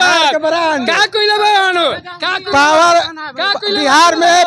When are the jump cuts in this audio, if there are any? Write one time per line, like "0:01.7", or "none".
none